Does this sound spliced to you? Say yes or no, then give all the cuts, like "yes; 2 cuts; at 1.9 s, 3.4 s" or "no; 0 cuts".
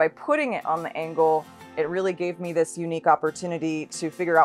no; 0 cuts